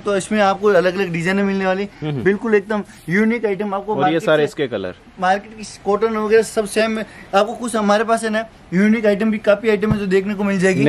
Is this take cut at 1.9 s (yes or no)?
no